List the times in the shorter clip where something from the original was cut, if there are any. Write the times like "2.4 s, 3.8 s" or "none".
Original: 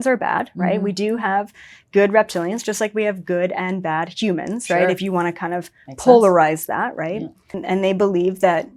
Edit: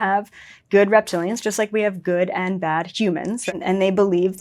3.4 s

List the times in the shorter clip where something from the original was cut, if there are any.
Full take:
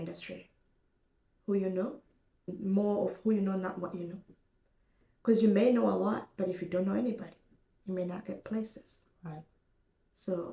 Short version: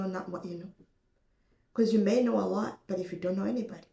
none

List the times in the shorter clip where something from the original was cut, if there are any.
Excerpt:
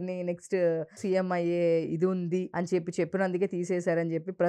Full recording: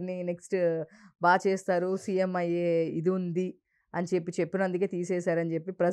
1.0 s, 2.5 s

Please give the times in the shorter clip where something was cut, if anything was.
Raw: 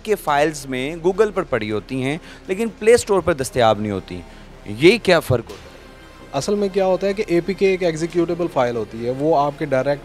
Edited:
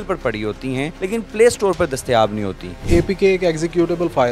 0.9 s, 2.8 s

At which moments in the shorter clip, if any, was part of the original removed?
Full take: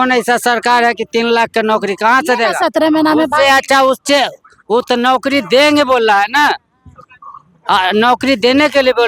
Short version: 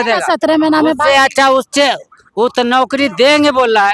none

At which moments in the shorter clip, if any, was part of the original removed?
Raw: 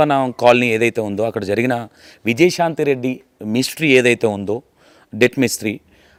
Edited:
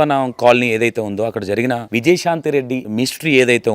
1.8 s, 2.8 s

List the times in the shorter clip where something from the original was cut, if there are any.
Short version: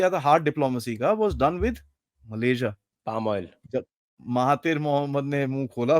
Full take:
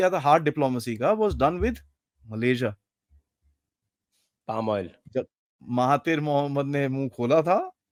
2.9 s

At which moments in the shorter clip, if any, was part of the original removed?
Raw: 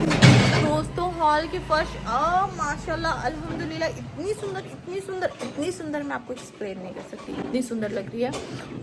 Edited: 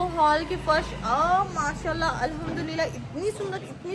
none

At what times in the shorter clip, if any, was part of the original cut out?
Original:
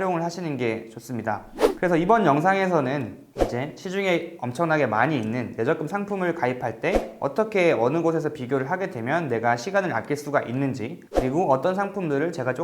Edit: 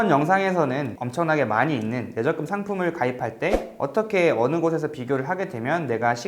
1.0 s

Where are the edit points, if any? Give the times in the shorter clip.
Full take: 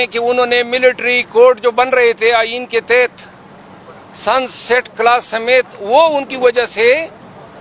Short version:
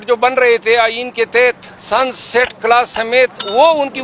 1.7 s

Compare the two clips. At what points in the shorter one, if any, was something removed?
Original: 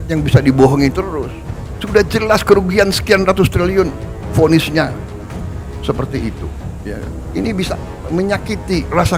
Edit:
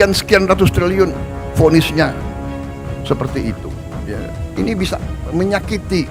none

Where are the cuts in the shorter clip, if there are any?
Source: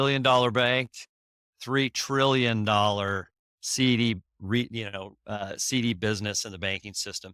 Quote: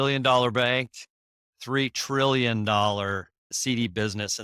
3.5 s

